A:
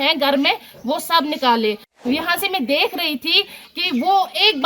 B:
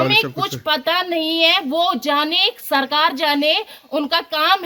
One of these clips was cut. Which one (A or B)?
A